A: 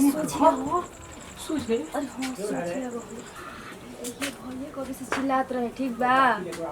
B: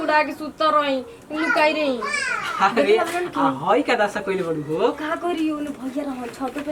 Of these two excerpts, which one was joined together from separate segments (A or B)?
A